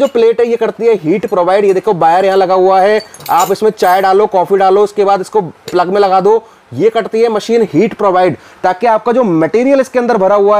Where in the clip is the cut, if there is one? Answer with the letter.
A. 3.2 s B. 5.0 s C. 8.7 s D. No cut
D